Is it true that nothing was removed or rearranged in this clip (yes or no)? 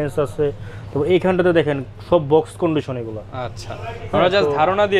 yes